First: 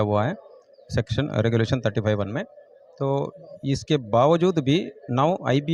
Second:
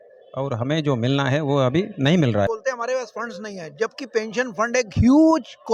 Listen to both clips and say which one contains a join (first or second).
second